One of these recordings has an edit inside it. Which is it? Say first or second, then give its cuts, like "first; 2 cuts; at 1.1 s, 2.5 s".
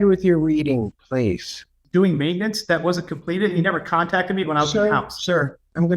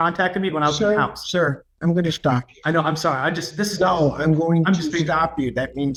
first; 1 cut; at 1.8 s